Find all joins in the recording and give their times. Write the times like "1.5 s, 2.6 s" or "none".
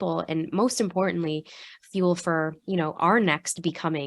none